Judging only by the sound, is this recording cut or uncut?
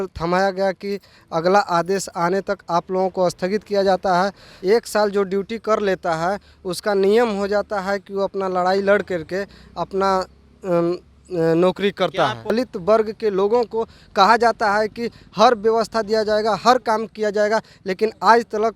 cut